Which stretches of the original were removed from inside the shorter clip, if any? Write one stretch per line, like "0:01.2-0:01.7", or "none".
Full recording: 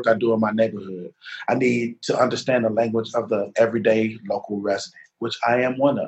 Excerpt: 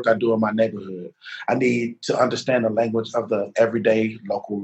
none